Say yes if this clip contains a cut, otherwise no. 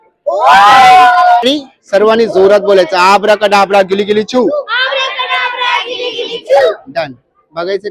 yes